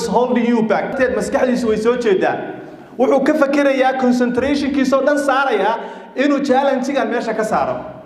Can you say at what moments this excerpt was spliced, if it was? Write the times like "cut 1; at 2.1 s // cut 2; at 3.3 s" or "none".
cut 1; at 0.9 s

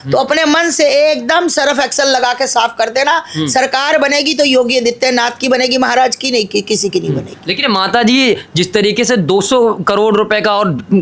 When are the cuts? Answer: none

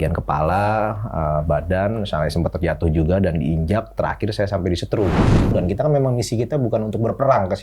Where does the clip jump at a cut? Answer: cut 1; at 5.5 s

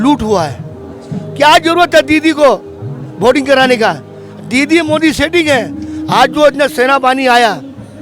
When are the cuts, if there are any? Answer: none

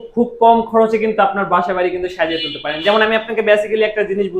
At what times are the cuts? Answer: none

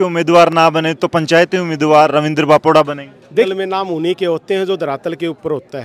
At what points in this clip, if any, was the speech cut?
cut 1; at 3.5 s

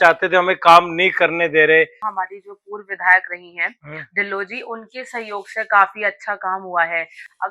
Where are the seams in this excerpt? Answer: cut 1; at 2.1 s

